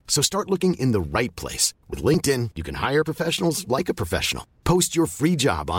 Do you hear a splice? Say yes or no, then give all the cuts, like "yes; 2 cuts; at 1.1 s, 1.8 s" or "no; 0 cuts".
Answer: no; 0 cuts